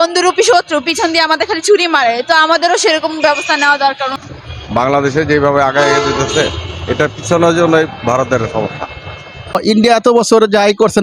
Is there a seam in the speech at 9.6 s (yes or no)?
yes